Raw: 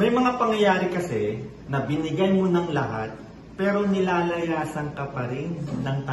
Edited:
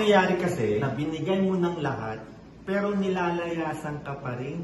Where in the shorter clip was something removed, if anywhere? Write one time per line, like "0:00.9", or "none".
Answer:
0:00.9